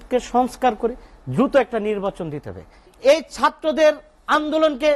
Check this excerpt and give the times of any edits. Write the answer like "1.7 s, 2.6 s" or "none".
2.9 s